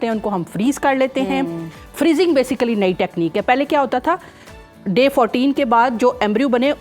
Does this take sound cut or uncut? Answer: uncut